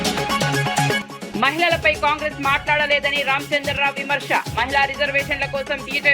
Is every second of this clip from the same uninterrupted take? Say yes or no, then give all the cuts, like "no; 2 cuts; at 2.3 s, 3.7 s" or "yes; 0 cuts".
no; 1 cut; at 1.0 s